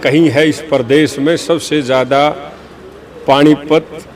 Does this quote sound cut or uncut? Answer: uncut